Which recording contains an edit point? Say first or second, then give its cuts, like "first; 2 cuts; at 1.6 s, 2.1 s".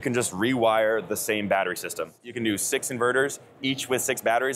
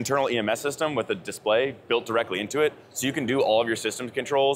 first; 1 cut; at 2.2 s